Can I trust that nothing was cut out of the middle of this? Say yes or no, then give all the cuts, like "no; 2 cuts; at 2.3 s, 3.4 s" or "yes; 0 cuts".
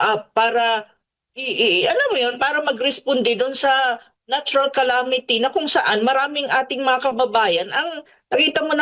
yes; 0 cuts